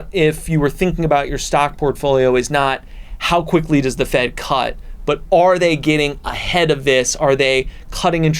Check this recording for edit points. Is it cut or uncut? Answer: uncut